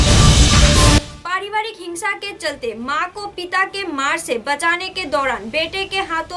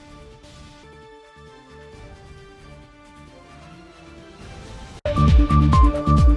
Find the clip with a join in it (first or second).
first